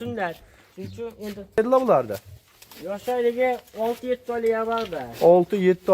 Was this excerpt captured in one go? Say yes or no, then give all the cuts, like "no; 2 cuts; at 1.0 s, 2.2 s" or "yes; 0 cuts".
no; 1 cut; at 1.6 s